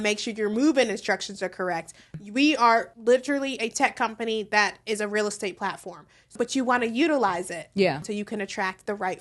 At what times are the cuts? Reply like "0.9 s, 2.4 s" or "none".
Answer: 2.2 s, 2.9 s, 6.3 s, 8.0 s